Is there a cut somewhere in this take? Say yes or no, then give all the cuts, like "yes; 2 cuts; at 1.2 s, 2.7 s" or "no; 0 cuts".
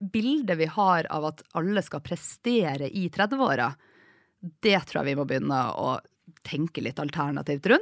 no; 0 cuts